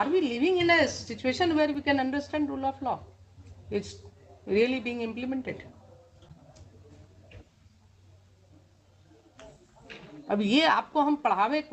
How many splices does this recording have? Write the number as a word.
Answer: zero